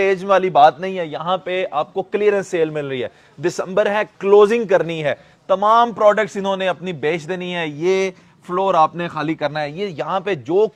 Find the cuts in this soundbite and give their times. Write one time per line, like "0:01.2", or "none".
none